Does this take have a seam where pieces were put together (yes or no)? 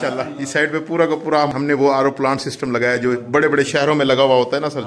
no